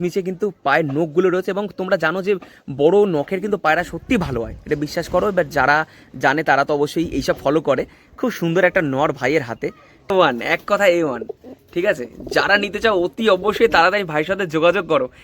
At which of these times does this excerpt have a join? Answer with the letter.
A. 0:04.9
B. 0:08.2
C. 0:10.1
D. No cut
C